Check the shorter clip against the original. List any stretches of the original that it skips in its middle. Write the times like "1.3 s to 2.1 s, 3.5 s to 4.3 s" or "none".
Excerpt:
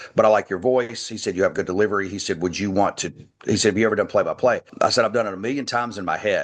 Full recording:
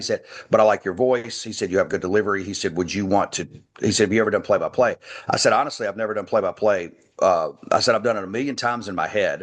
5.0 s to 7.6 s

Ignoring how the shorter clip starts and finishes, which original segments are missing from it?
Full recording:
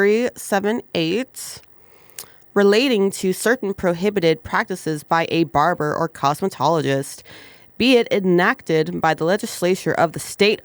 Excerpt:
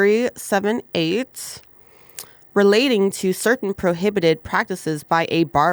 none

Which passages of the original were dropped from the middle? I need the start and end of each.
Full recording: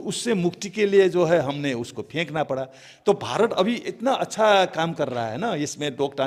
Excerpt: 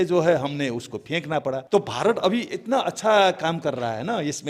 2.7 s to 3.0 s

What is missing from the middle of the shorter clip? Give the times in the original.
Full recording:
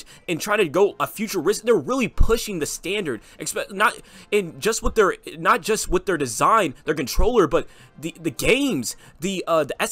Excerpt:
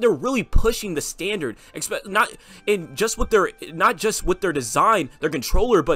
none

